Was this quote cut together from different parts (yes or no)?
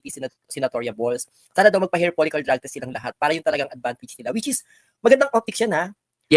no